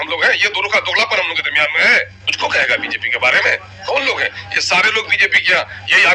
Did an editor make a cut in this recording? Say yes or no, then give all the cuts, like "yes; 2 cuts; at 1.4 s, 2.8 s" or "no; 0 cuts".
yes; 1 cut; at 2.2 s